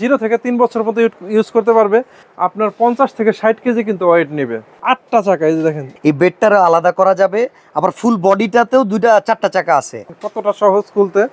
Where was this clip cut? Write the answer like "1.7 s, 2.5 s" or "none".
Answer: 2.1 s, 4.7 s, 5.9 s, 10.1 s